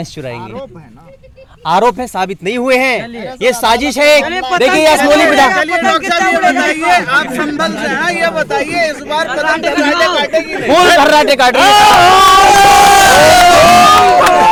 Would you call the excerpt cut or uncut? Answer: uncut